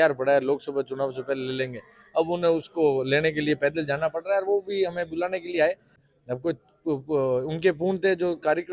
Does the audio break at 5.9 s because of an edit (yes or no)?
yes